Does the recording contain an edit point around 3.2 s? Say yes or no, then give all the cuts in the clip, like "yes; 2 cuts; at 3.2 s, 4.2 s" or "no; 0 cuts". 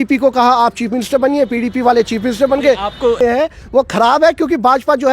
yes; 1 cut; at 3.2 s